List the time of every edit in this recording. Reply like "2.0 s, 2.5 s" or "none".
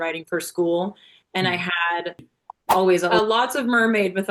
3.2 s